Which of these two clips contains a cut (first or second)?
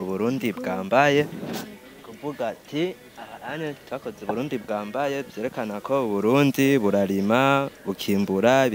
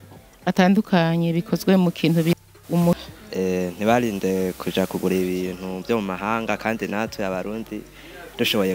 second